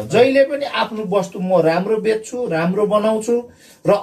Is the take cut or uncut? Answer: uncut